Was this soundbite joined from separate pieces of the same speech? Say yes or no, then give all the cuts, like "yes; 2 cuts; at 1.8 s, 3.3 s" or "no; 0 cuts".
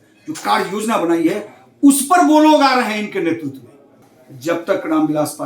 yes; 1 cut; at 4.1 s